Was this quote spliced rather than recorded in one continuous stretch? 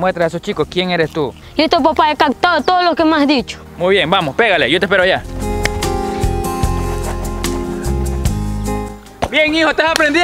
yes; 2 cuts; at 1.4 s, 5.3 s

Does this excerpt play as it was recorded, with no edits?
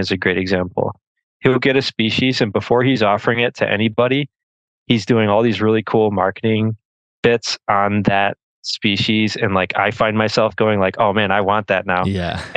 yes; 0 cuts

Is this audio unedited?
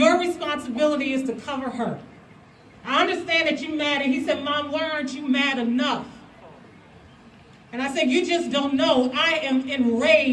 yes; 0 cuts

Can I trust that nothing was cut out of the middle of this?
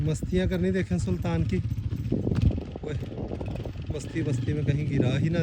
yes; 0 cuts

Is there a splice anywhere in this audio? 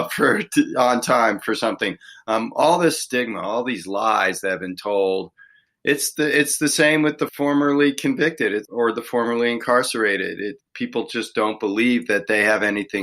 yes; 3 cuts; at 7.2 s, 8.7 s, 10.6 s

